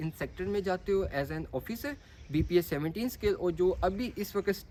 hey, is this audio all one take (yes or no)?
yes